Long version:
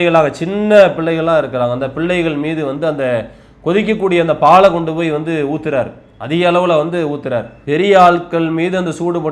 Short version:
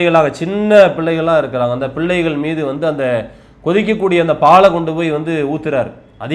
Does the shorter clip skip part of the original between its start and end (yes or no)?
no